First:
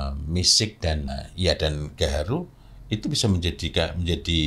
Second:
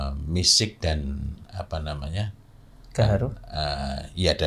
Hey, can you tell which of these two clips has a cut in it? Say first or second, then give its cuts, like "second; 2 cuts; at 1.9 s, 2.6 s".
first; 1 cut; at 1.1 s